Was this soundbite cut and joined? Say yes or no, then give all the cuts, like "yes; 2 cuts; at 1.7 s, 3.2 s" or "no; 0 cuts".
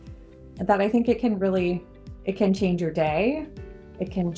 no; 0 cuts